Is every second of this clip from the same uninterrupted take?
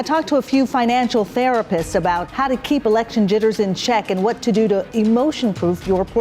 no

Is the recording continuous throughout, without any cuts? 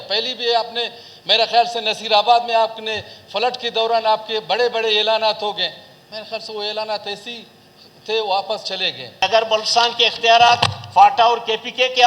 no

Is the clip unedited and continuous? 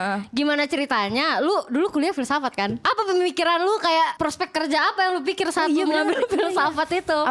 no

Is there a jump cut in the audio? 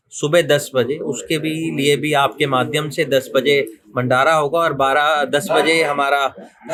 no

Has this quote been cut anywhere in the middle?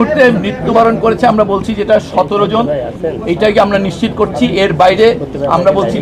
no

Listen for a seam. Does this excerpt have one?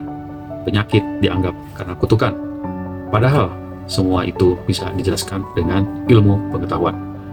no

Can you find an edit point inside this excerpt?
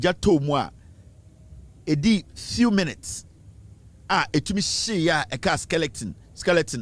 no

